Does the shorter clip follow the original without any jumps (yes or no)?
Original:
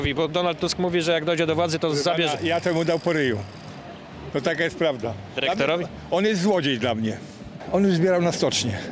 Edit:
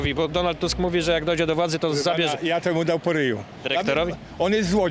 no